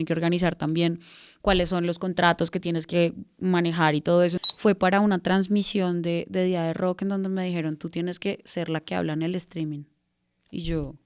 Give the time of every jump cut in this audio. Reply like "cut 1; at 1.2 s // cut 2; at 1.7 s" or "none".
cut 1; at 4.4 s